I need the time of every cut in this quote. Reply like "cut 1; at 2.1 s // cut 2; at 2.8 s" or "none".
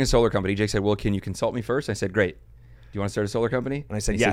none